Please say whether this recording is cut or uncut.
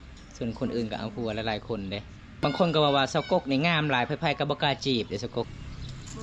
cut